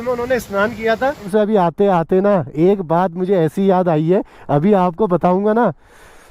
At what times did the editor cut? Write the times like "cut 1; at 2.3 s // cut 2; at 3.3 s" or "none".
cut 1; at 1.3 s